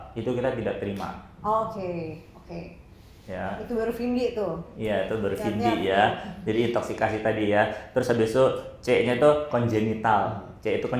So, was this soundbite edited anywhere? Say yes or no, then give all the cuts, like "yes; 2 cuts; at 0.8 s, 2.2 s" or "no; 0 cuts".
no; 0 cuts